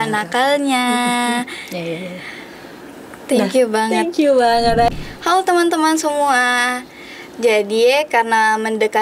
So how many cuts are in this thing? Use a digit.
1